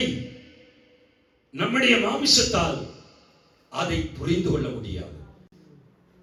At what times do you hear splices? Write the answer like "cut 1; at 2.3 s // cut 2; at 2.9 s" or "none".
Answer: none